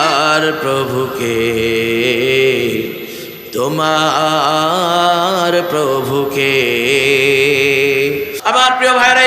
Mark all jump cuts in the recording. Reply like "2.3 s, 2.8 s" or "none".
8.3 s